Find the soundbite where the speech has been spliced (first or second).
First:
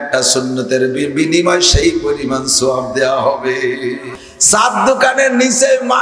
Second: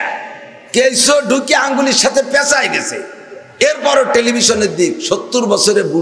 first